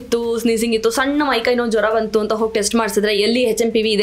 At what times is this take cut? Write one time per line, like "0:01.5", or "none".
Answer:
none